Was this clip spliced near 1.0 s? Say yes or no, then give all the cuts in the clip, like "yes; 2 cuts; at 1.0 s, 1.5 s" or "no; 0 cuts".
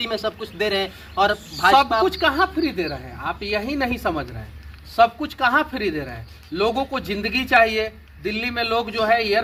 no; 0 cuts